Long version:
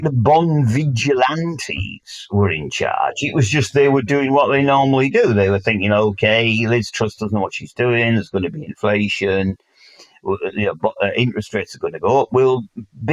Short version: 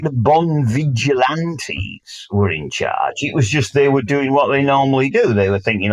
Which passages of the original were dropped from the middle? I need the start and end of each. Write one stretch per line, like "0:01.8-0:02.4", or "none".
none